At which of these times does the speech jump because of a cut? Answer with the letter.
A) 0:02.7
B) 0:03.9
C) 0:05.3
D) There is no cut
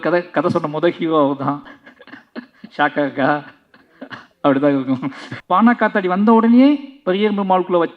C